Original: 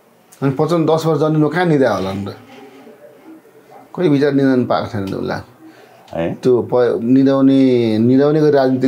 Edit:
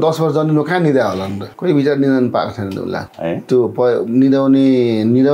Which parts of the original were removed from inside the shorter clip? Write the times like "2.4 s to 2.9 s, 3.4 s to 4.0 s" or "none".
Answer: 2.3 s to 3.8 s, 5.4 s to 6.0 s